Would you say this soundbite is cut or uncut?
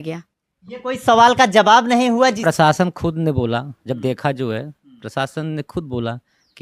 cut